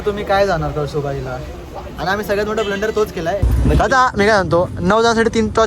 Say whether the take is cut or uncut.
cut